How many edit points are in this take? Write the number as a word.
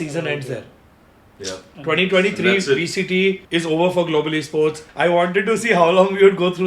two